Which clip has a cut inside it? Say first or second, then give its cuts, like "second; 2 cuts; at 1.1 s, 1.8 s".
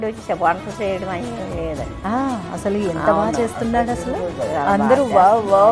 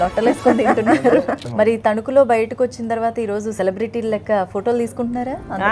second; 2 cuts; at 1.4 s, 3.5 s